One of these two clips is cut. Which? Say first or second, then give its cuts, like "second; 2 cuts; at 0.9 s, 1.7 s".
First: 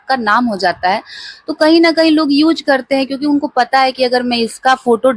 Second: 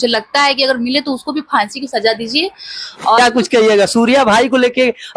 second; 1 cut; at 3.2 s